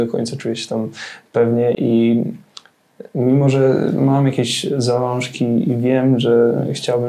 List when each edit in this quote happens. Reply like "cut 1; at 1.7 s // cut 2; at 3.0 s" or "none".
none